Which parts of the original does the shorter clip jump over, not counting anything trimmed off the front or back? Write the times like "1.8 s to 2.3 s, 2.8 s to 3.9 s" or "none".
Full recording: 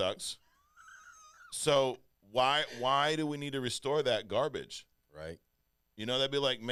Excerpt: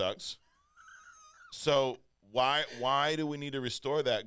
none